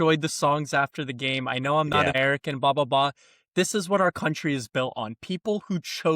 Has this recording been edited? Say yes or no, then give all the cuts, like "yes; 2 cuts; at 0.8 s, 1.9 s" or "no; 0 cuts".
yes; 1 cut; at 2.0 s